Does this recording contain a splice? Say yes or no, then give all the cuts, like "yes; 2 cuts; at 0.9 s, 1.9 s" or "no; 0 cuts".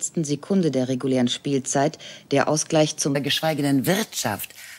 no; 0 cuts